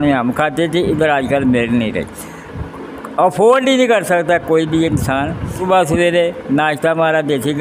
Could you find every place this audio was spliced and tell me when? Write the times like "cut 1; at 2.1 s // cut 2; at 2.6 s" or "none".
cut 1; at 5.6 s